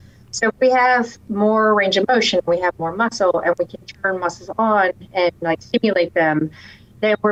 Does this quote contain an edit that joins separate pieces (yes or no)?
no